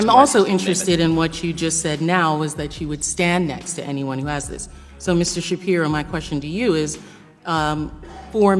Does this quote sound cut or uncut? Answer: uncut